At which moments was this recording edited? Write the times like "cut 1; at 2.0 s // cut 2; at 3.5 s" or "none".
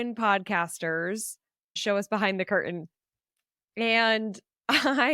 cut 1; at 1.7 s